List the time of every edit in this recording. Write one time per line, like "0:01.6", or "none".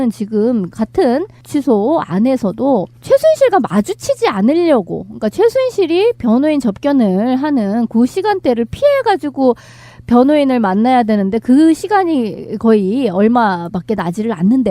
0:12.7